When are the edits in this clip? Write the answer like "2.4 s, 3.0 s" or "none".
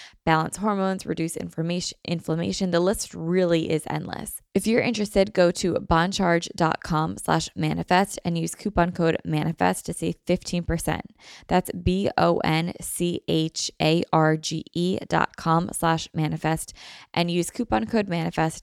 4.3 s